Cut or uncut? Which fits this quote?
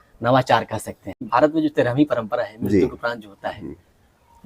cut